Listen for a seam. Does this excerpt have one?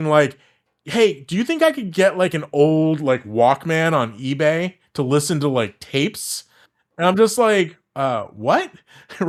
no; 0 cuts

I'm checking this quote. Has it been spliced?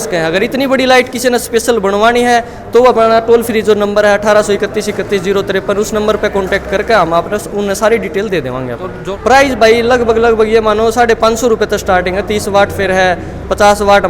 yes; 1 cut; at 8.9 s

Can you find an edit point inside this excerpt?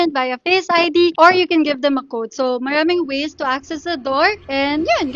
no; 0 cuts

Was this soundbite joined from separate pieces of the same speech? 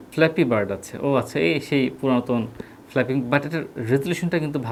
no; 0 cuts

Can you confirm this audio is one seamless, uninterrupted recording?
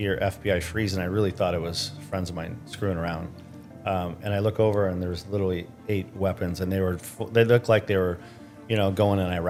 yes; 0 cuts

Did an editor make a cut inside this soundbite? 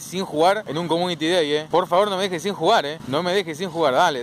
no; 0 cuts

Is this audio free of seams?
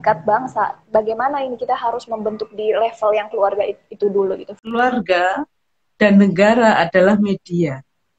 no; 1 cut; at 4.6 s

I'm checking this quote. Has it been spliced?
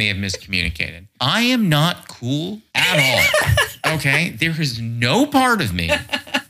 no; 0 cuts

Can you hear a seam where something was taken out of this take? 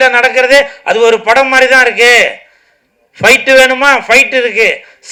no; 0 cuts

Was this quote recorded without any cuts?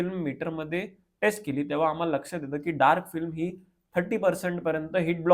yes; 0 cuts

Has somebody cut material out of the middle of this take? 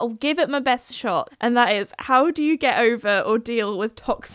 yes; 1 cut; at 1.3 s

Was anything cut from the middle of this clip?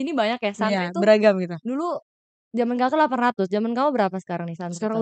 no; 0 cuts

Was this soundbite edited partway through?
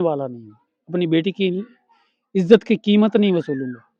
no; 0 cuts

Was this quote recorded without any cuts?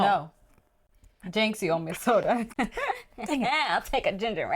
yes; 0 cuts

